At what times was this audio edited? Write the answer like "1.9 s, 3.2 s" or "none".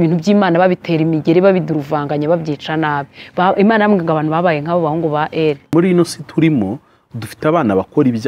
5.7 s